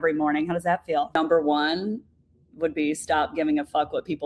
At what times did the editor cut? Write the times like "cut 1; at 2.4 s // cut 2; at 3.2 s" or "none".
cut 1; at 1.1 s